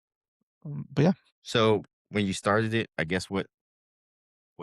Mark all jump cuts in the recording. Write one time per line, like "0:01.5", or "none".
0:01.3
0:02.0